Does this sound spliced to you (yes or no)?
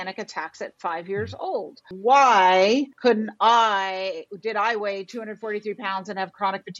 yes